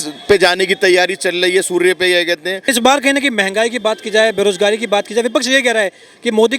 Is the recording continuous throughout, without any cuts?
no; 1 cut; at 2.7 s

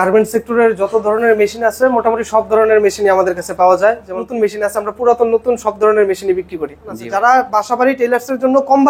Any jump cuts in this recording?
yes; 2 cuts; at 4.2 s, 7.0 s

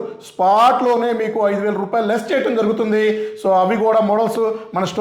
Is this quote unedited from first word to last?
yes; 0 cuts

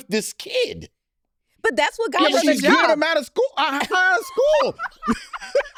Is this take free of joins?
yes; 0 cuts

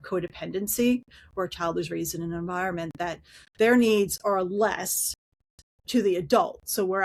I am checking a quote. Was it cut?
no; 0 cuts

